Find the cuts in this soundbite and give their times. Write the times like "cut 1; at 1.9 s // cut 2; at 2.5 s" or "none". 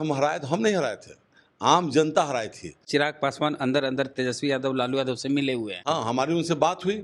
cut 1; at 2.8 s // cut 2; at 5.8 s